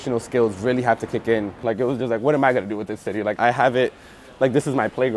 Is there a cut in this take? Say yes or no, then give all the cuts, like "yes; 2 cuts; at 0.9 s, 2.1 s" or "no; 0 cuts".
yes; 2 cuts; at 1.5 s, 3.3 s